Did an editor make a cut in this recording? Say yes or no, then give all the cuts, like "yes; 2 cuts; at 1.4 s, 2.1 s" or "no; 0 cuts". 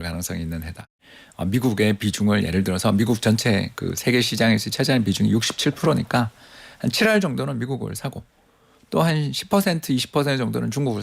yes; 1 cut; at 1.0 s